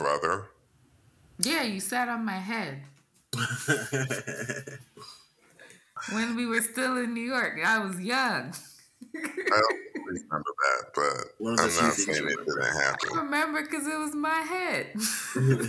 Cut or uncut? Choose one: cut